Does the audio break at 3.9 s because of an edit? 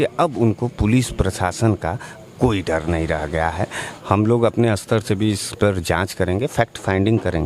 yes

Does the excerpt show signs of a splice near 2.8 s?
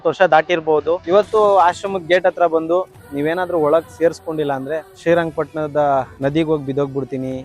no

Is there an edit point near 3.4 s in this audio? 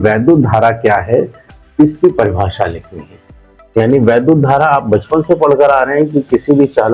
no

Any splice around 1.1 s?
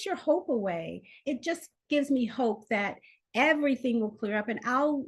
yes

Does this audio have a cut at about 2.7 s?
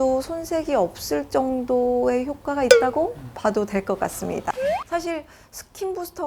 no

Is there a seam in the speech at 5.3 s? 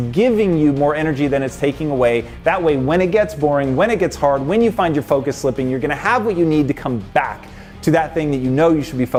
no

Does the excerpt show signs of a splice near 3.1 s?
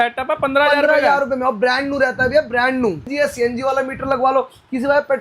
yes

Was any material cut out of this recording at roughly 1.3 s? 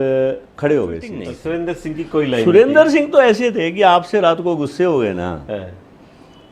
yes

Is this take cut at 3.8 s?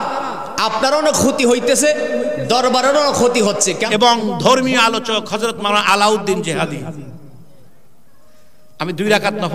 yes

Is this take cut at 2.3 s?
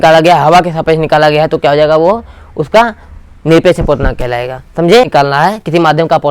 no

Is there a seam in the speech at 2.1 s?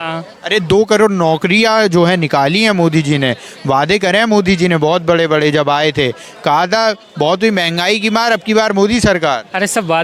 no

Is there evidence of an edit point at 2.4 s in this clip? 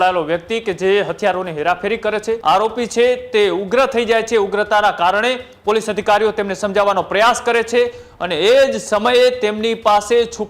yes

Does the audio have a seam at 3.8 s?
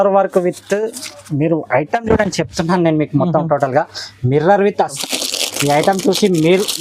no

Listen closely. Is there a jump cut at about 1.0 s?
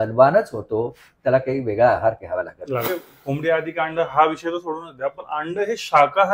no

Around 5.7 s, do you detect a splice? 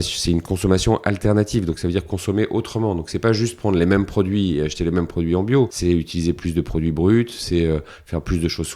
yes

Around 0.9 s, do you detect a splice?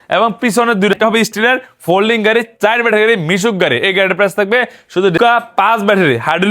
yes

